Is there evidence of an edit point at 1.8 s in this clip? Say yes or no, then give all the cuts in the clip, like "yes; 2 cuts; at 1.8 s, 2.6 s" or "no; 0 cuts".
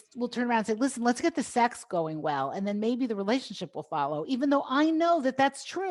no; 0 cuts